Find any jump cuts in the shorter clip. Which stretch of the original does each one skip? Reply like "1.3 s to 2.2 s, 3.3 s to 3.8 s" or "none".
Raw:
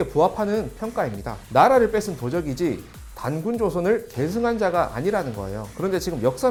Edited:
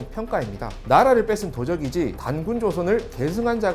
2.9 s to 3.2 s